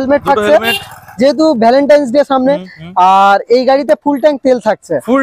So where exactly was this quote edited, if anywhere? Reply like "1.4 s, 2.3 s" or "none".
none